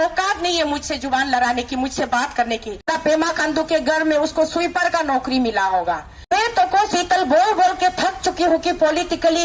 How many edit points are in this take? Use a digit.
2